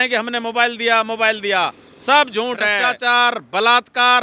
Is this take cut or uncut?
cut